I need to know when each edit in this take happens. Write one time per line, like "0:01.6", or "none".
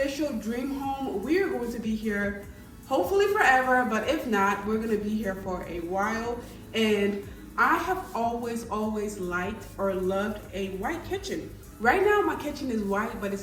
none